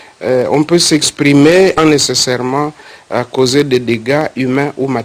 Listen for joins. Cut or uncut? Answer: uncut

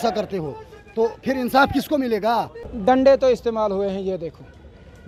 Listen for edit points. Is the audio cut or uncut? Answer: cut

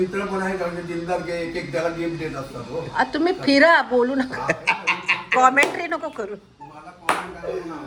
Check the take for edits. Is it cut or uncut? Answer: uncut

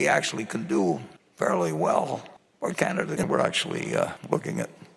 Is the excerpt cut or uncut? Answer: cut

